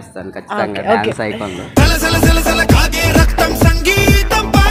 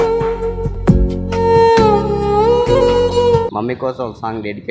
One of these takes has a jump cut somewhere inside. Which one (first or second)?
second